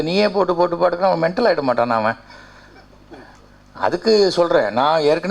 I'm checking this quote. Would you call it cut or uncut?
uncut